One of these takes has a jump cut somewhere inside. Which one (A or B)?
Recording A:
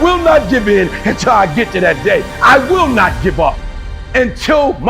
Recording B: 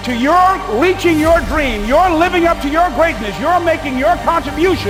A